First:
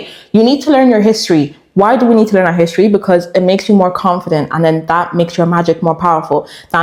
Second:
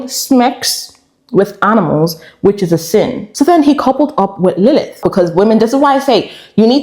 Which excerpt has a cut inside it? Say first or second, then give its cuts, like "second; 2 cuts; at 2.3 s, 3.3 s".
second; 2 cuts; at 3.2 s, 5.0 s